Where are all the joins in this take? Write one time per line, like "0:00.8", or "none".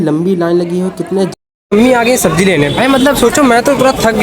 0:01.3